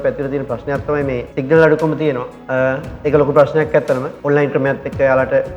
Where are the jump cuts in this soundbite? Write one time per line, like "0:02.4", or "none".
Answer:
0:01.3
0:02.3
0:04.1